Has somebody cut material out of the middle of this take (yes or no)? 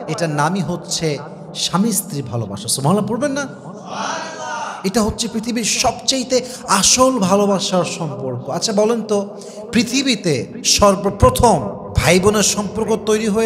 no